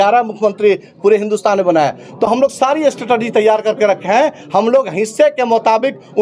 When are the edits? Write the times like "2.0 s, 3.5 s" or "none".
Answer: none